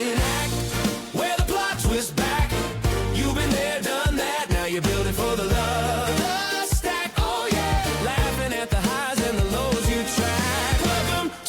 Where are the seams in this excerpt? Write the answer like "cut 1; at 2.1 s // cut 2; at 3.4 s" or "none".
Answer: none

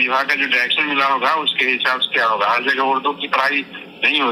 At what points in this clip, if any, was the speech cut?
none

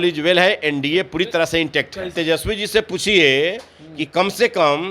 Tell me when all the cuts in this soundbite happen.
cut 1; at 2.2 s

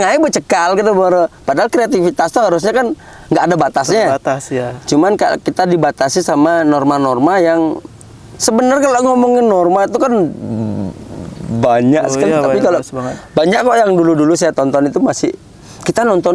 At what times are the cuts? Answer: none

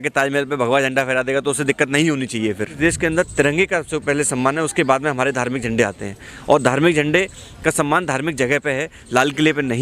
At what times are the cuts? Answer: cut 1; at 2.8 s

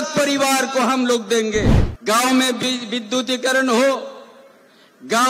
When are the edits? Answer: cut 1; at 1.8 s

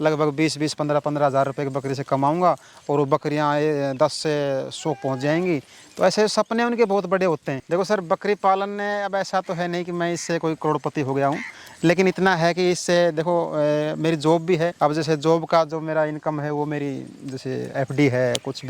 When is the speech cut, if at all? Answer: cut 1; at 7.5 s

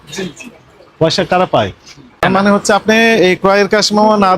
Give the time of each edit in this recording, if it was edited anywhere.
cut 1; at 2.2 s

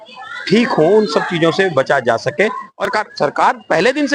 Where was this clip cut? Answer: cut 1; at 2.9 s

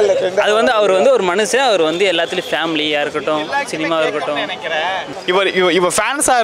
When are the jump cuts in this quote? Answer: cut 1; at 5.1 s

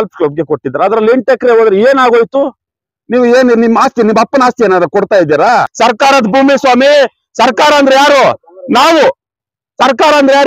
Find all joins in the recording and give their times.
cut 1; at 5.7 s

